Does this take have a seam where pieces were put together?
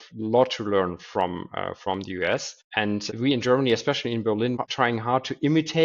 yes; 1 cut; at 4.6 s

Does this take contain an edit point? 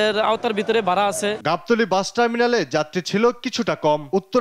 no; 0 cuts

